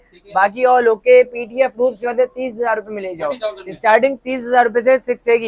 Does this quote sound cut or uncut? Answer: uncut